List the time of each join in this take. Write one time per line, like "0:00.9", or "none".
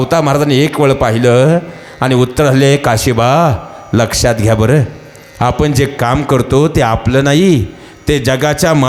none